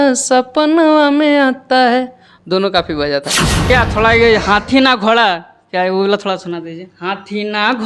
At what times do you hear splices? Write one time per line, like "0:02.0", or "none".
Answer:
0:03.7